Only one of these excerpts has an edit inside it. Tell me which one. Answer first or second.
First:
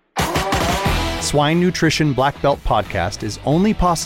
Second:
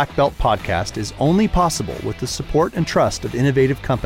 first